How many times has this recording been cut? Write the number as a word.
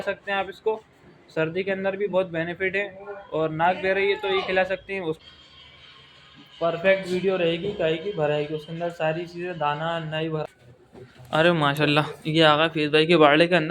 two